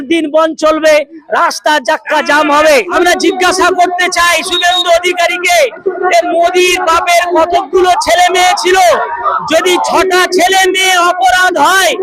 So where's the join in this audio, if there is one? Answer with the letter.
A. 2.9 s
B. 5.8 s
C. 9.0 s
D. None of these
A